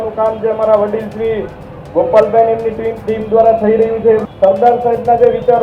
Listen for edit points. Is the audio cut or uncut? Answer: cut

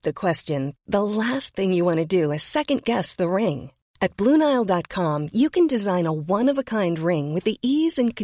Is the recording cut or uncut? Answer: uncut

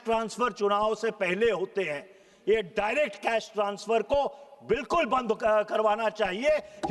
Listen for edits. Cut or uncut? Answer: uncut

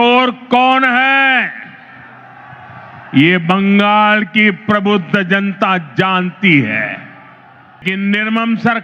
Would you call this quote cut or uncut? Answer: cut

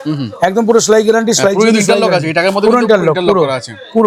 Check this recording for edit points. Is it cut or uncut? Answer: uncut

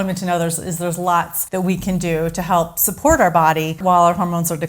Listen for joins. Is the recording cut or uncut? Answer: cut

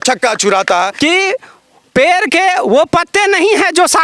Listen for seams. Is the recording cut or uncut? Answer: cut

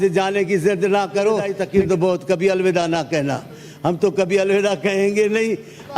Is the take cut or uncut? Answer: cut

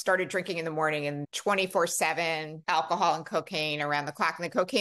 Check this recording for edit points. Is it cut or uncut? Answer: cut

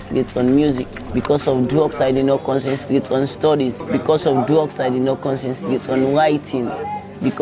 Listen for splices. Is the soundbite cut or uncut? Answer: uncut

